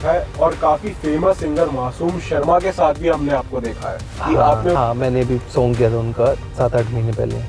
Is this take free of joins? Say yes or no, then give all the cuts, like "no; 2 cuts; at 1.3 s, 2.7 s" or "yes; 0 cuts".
no; 1 cut; at 4.8 s